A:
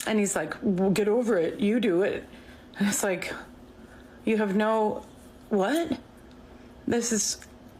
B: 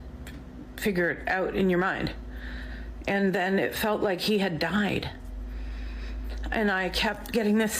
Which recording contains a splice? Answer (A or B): B